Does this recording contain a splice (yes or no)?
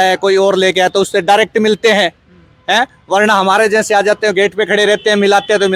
no